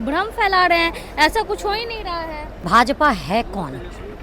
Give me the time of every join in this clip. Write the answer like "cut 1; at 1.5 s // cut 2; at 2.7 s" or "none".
cut 1; at 2.6 s